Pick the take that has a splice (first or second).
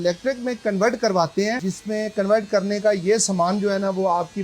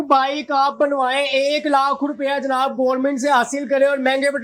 first